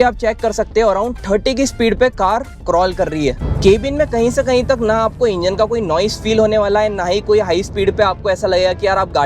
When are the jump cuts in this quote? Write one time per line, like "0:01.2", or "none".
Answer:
0:03.5